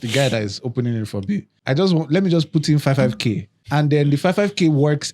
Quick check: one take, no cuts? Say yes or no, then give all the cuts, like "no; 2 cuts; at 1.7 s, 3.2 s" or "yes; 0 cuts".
no; 2 cuts; at 1.6 s, 3.5 s